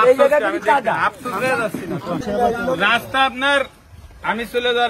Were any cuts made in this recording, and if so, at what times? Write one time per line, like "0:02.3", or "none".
0:02.2

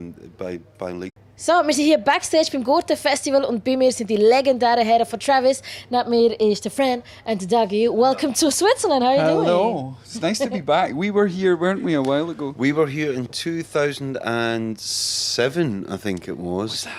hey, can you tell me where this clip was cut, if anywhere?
none

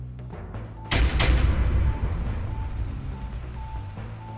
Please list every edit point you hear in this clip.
0:00.9

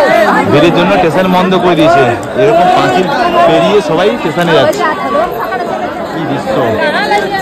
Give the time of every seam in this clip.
none

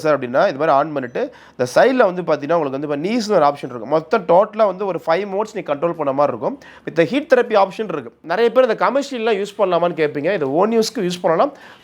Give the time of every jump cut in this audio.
0:08.2

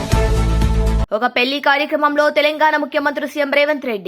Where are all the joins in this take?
0:01.0

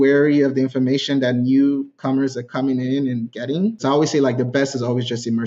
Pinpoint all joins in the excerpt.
0:03.8

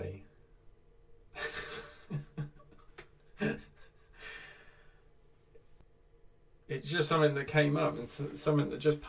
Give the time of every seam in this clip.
0:05.8

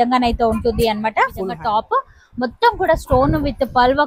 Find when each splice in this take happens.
0:01.6

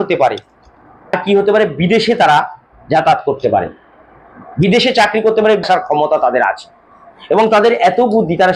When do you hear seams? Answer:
0:01.1
0:05.6

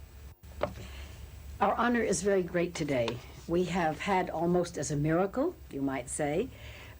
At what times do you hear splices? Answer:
0:05.7

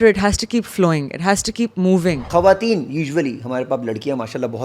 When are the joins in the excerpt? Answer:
0:02.2

